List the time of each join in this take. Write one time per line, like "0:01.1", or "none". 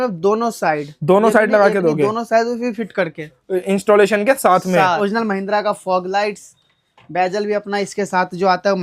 0:05.0